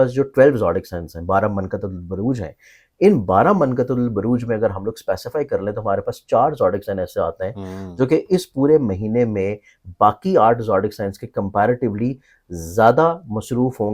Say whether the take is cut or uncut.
uncut